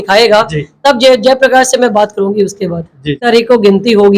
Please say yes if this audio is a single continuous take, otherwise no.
no